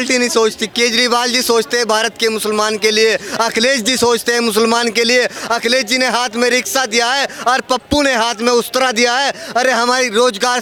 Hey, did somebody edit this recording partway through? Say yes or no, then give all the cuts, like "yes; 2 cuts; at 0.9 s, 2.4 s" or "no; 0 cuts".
no; 0 cuts